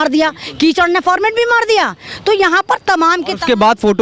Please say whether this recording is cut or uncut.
uncut